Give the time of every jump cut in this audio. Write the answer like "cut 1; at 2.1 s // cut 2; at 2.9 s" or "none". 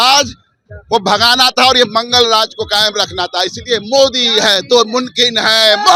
none